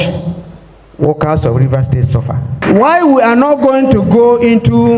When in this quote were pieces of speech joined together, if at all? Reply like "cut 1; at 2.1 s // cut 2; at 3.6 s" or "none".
cut 1; at 2.6 s